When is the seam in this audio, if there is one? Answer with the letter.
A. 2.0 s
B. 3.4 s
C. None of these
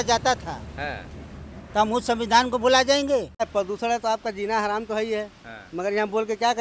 B